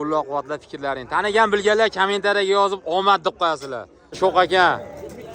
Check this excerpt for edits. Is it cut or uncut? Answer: cut